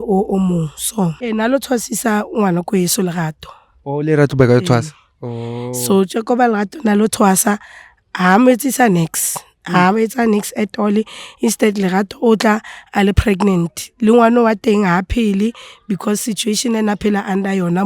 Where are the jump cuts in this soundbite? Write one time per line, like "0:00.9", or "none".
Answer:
0:01.2